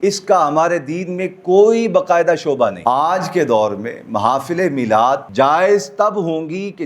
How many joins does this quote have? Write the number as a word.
two